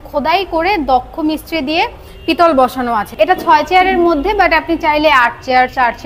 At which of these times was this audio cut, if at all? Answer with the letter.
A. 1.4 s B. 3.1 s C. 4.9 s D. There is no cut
B